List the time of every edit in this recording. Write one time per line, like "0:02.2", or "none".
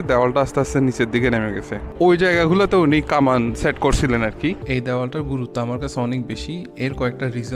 0:01.9
0:04.6